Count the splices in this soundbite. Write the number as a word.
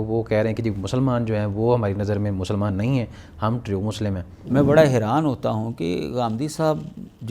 one